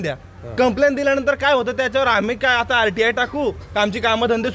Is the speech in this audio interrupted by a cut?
no; 0 cuts

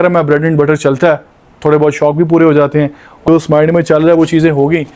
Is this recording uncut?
no; 1 cut; at 3.2 s

